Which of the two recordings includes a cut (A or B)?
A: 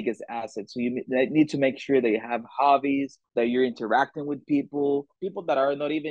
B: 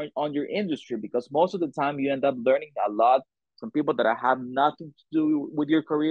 A